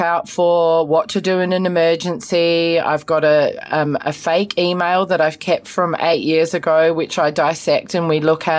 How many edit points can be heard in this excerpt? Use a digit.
0